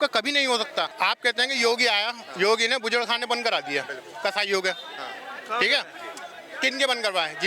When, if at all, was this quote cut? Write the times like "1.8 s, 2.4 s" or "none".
0.9 s